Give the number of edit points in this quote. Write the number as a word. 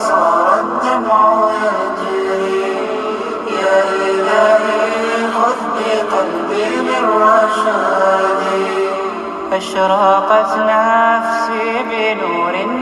zero